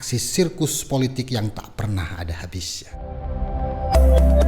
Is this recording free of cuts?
no; 1 cut; at 2.8 s

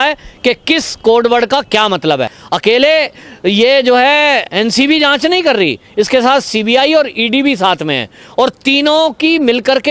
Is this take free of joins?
no; 1 cut; at 2.4 s

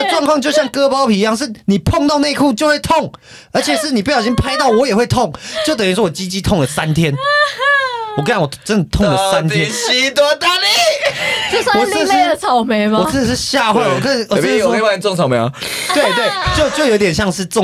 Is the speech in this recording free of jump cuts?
yes; 0 cuts

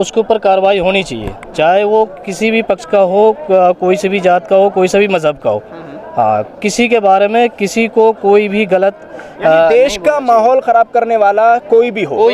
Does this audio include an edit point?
no; 0 cuts

